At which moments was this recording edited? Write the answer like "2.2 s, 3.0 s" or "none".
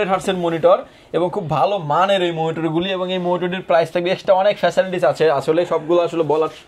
none